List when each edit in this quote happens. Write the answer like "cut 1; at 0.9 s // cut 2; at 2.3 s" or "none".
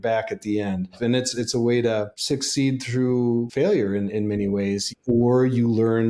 cut 1; at 1.0 s // cut 2; at 2.1 s // cut 3; at 3.5 s // cut 4; at 4.9 s